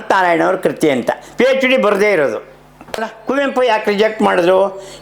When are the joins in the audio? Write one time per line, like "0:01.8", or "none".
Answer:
0:03.1